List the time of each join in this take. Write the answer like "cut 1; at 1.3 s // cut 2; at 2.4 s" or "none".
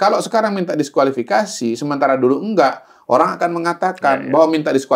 none